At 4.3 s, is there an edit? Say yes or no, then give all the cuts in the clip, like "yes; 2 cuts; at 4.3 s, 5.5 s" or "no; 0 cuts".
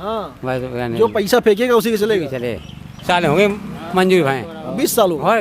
no; 1 cut; at 3.0 s